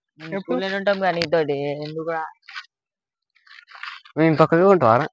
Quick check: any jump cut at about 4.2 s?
no; 0 cuts

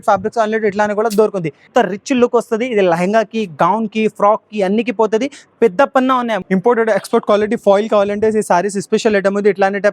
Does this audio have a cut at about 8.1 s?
no; 2 cuts; at 1.7 s, 6.4 s

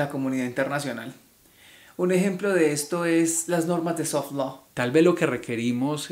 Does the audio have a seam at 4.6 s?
yes; 1 cut; at 4.6 s

